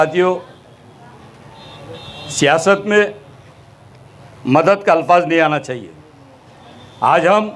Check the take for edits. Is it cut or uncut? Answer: uncut